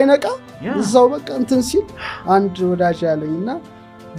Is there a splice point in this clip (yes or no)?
no